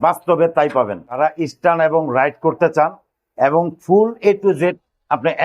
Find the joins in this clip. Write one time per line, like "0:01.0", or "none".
0:01.2